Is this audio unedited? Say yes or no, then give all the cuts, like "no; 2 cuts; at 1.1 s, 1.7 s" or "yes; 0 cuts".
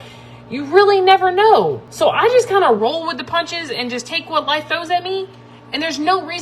no; 1 cut; at 1.8 s